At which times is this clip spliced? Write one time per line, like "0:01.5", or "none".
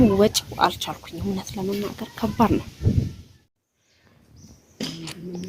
0:03.5